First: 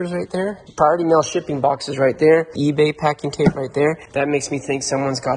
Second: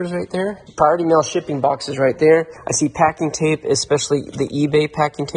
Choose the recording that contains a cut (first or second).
first